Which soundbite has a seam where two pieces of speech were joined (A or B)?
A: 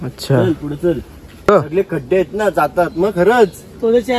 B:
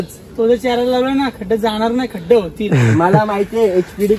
A